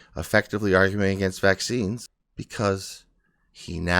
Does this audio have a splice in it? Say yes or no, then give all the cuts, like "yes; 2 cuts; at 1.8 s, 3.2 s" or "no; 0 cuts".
yes; 1 cut; at 2.0 s